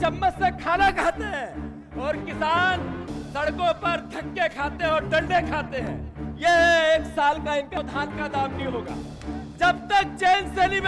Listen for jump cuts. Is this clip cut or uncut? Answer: cut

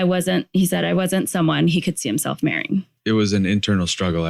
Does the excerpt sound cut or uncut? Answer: cut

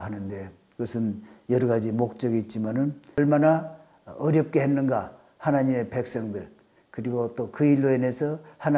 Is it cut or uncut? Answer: cut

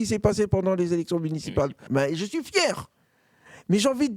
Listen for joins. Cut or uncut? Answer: cut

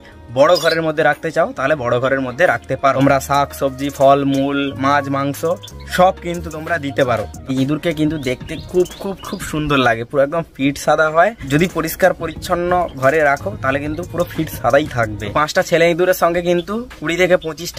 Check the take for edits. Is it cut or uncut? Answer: cut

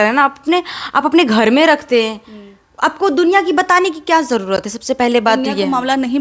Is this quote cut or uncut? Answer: uncut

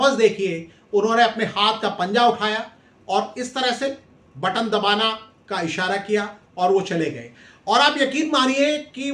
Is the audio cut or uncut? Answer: uncut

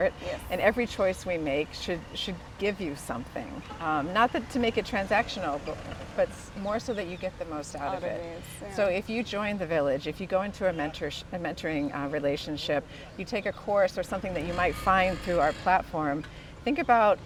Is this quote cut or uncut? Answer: uncut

